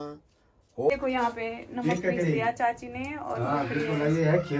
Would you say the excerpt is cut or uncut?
cut